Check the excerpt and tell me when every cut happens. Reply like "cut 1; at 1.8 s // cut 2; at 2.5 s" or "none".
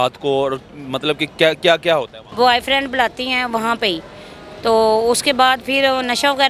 cut 1; at 2.2 s